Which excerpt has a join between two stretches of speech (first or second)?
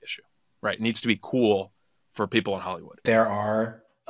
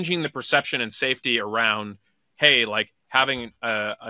first